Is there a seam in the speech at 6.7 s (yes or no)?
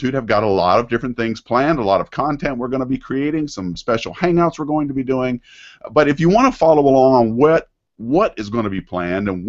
yes